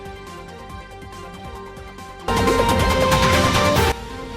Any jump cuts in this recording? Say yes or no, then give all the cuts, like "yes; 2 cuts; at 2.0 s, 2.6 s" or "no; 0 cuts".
yes; 1 cut; at 2.3 s